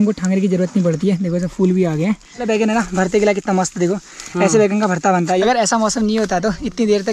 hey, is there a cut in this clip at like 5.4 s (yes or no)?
yes